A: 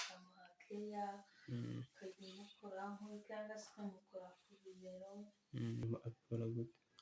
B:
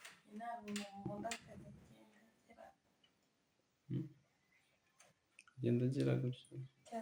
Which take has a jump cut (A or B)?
A